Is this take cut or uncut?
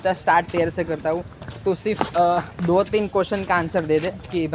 uncut